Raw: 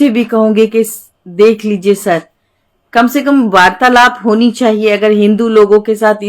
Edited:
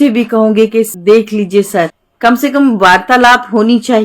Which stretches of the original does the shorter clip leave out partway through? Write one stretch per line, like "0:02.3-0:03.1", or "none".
0:00.9-0:01.3
0:02.4-0:02.8